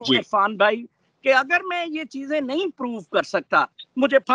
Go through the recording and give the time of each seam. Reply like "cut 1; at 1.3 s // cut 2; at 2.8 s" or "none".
none